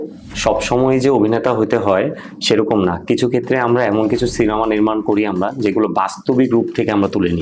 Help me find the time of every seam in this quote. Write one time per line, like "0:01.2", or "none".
none